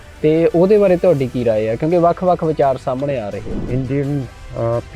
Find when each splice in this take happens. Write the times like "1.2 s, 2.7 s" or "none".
3.6 s